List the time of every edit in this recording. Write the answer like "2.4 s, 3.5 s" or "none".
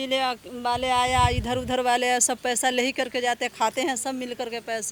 none